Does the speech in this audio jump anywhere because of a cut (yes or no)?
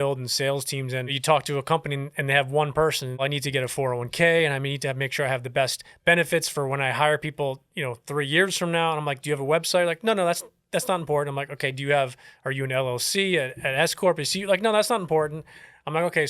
yes